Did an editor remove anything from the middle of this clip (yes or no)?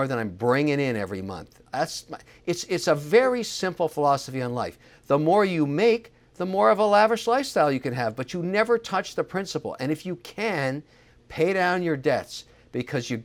no